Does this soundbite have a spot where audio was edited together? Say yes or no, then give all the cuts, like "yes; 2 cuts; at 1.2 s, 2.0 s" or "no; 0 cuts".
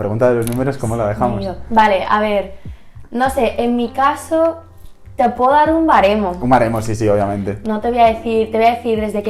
no; 0 cuts